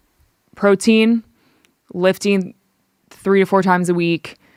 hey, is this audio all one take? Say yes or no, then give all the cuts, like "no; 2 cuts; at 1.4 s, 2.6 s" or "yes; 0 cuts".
yes; 0 cuts